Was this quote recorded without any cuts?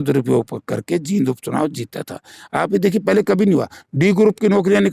yes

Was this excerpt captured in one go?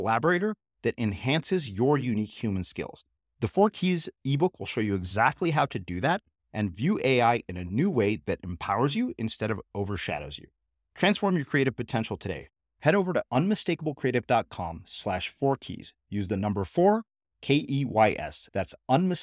yes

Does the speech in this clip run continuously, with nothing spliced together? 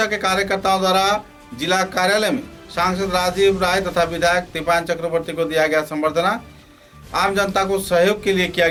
yes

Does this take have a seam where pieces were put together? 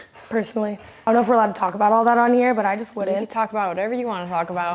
yes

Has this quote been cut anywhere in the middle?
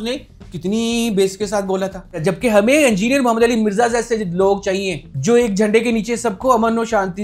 yes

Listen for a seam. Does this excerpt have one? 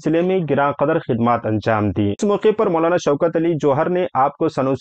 yes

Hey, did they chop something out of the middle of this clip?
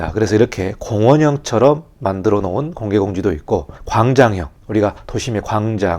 yes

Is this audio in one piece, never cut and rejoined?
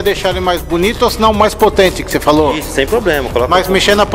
yes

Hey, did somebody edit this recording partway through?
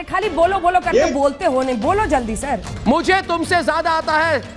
yes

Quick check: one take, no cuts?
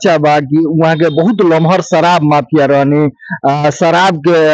yes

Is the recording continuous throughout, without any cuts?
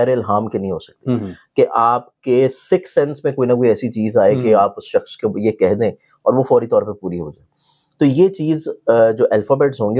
yes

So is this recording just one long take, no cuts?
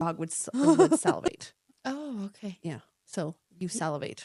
no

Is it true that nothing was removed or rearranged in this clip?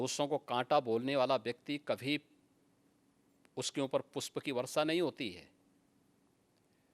yes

